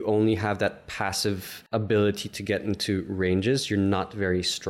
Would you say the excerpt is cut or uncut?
cut